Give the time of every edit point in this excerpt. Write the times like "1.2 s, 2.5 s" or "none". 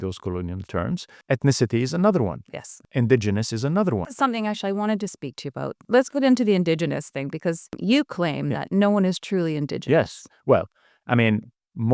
1.1 s, 2.8 s, 4.1 s, 5.8 s, 7.8 s